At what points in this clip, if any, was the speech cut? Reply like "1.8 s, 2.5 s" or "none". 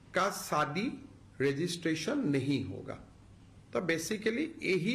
2.4 s